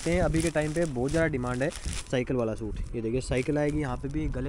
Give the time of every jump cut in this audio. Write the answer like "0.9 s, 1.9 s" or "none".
none

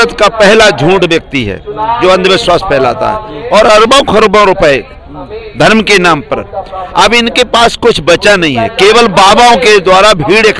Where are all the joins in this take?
none

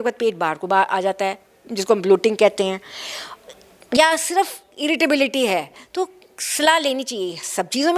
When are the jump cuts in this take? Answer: none

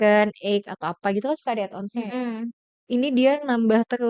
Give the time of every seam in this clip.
2.7 s

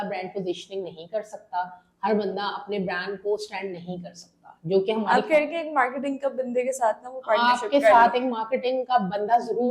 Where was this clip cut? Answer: none

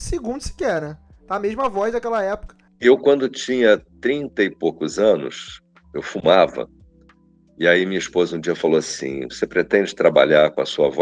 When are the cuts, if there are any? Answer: none

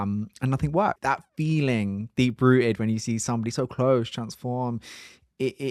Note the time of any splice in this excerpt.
1.0 s

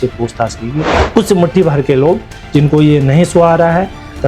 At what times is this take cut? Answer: 1.0 s

